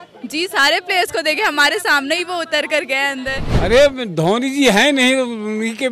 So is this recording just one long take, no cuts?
no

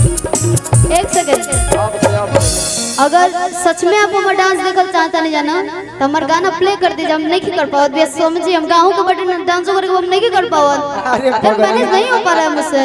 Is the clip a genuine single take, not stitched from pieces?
yes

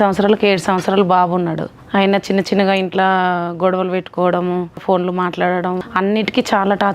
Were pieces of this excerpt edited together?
yes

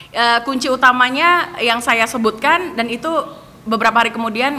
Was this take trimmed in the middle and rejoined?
no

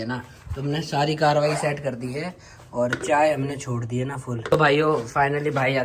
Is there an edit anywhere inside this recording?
yes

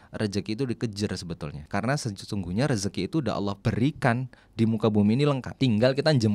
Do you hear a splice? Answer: yes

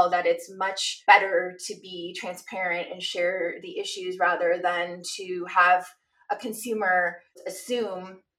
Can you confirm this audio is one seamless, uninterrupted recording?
no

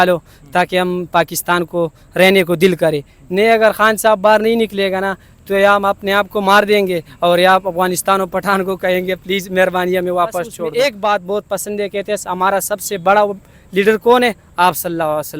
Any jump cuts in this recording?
yes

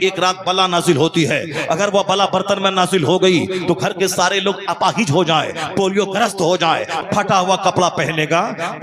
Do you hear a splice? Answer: yes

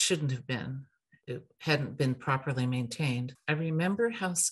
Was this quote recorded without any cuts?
no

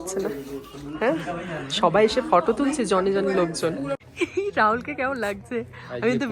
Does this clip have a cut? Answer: yes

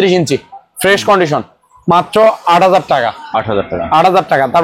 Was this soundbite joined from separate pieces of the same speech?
no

